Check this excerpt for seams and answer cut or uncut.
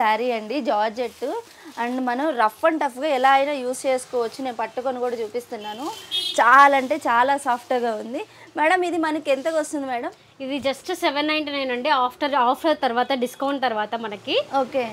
uncut